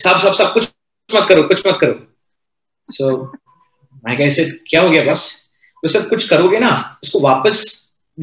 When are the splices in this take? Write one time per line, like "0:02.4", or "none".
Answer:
none